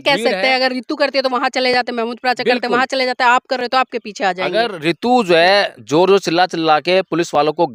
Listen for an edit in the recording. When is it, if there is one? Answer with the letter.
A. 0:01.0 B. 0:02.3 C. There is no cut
C